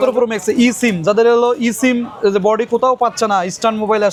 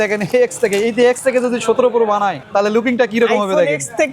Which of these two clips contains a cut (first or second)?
second